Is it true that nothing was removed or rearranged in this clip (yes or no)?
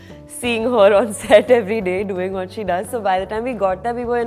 yes